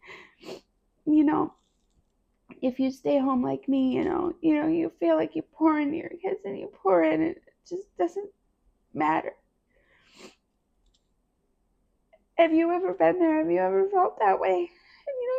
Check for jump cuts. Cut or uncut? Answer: uncut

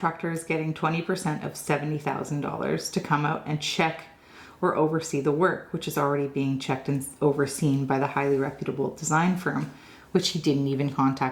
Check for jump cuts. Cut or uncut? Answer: uncut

